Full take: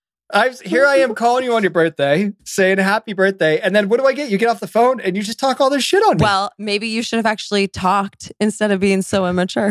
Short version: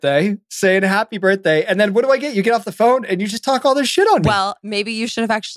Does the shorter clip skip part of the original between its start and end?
no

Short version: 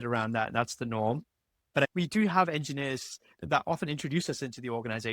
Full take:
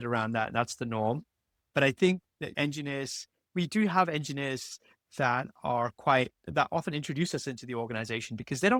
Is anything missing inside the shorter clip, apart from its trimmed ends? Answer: yes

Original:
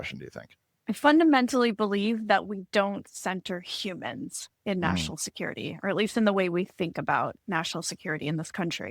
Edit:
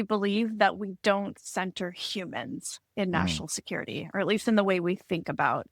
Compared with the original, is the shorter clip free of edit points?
yes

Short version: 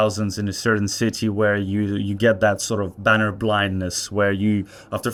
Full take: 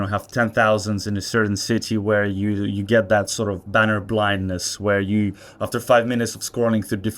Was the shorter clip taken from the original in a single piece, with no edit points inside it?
yes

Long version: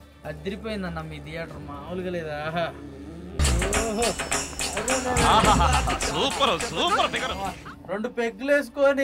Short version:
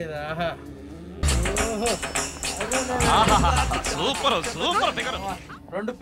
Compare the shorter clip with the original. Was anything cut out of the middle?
no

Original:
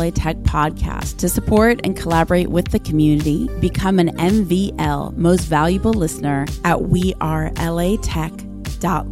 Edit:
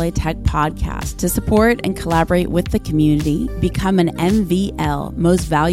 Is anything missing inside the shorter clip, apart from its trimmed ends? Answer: no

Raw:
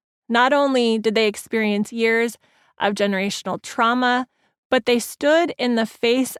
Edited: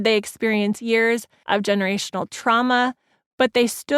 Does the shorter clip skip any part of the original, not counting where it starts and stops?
yes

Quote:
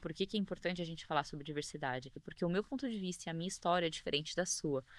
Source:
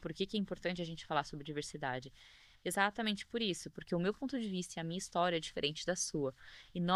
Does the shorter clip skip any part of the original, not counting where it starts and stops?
yes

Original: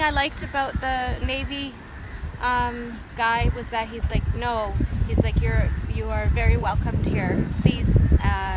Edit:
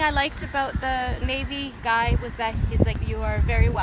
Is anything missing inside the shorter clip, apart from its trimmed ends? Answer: yes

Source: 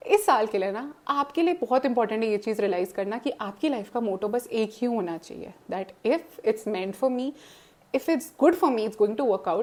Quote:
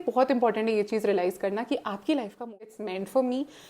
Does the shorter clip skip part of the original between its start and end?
yes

